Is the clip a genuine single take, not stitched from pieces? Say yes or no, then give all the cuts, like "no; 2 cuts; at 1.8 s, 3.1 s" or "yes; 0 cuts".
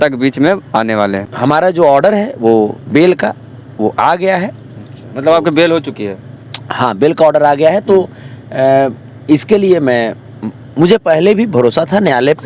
no; 1 cut; at 1.3 s